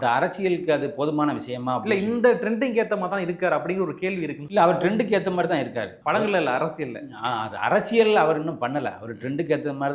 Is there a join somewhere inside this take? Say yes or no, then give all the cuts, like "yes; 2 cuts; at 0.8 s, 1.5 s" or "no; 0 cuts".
no; 0 cuts